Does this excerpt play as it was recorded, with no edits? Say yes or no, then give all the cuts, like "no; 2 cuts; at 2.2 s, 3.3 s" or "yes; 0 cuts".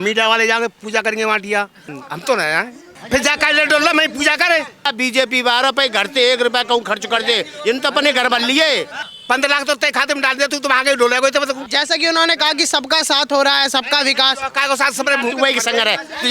no; 5 cuts; at 1.8 s, 2.9 s, 4.9 s, 9.0 s, 11.6 s